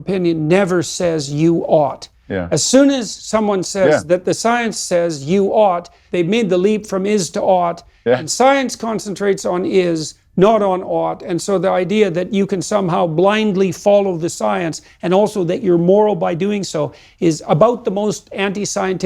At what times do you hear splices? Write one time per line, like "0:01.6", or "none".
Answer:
0:06.0